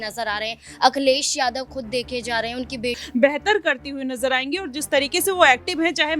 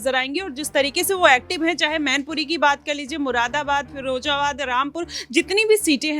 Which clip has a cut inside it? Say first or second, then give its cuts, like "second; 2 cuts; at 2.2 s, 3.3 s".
first; 1 cut; at 3.0 s